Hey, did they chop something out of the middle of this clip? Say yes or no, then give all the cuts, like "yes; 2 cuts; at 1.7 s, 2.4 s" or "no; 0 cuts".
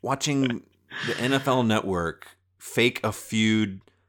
yes; 1 cut; at 2.5 s